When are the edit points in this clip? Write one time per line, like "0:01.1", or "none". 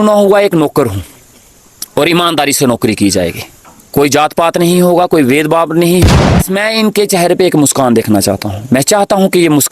0:06.0